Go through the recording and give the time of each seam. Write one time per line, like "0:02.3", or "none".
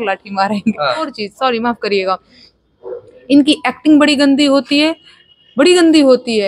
0:01.1